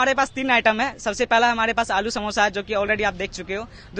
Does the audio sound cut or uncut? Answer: uncut